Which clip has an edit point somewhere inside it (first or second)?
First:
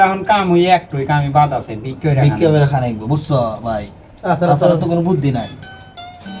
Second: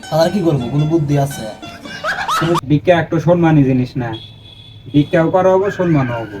second